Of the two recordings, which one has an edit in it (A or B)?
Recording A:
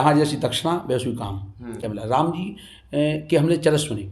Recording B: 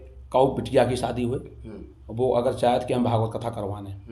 A